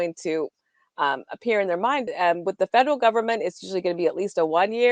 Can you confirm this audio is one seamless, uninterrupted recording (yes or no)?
no